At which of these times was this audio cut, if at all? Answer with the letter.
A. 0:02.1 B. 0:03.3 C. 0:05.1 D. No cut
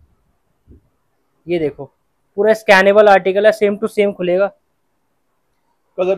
D